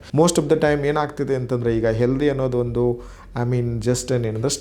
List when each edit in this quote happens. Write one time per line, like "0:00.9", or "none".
none